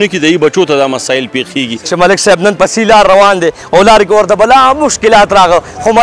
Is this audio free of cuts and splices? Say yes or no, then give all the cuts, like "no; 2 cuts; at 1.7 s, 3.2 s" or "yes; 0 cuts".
no; 1 cut; at 1.8 s